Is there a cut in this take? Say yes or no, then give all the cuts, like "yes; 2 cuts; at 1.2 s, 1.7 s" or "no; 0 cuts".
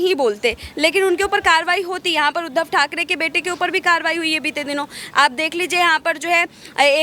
no; 0 cuts